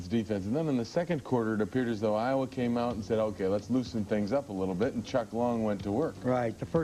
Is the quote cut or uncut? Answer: cut